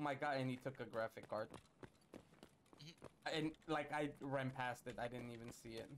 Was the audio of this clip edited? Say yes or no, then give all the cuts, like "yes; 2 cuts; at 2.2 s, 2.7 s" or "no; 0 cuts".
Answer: no; 0 cuts